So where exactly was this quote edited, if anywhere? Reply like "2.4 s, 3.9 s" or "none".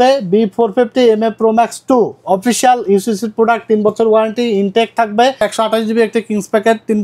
5.4 s